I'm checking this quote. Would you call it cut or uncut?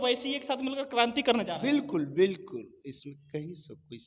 uncut